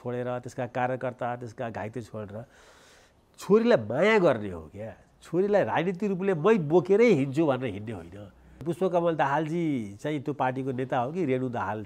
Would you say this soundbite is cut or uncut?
cut